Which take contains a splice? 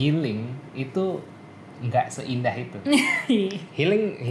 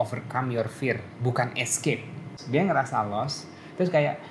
second; 1 cut; at 2.3 s

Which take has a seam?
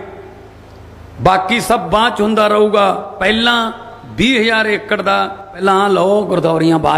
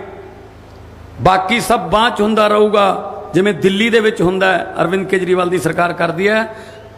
first; 2 cuts; at 3.1 s, 5.6 s

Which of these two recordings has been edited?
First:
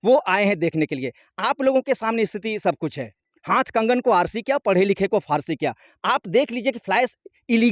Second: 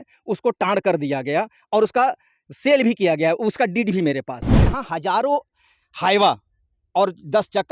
second; 1 cut; at 4.7 s

